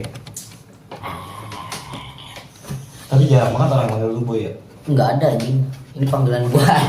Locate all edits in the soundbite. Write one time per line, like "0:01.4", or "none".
none